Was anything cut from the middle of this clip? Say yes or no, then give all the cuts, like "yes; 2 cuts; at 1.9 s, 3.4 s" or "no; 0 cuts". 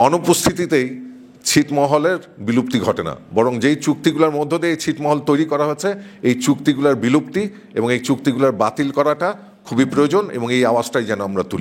no; 0 cuts